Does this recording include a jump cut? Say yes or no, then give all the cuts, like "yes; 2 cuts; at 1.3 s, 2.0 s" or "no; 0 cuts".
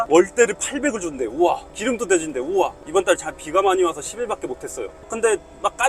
yes; 2 cuts; at 2.8 s, 5.1 s